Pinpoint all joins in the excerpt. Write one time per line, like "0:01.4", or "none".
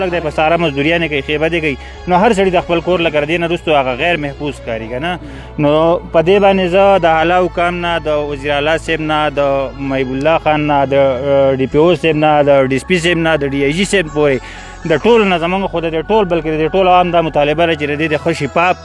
none

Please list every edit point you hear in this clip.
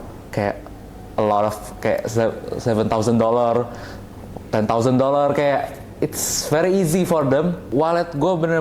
0:07.6

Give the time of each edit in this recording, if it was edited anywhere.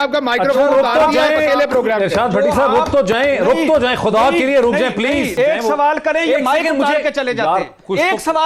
0:05.3

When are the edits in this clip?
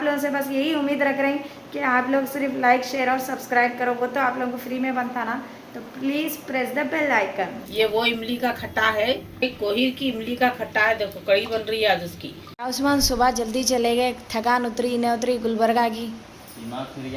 0:07.6
0:12.6

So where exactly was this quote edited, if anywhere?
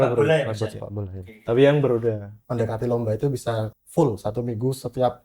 0:02.3
0:03.7

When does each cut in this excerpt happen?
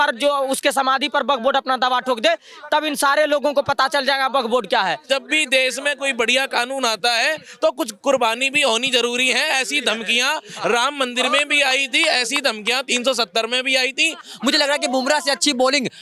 0:05.0
0:14.3

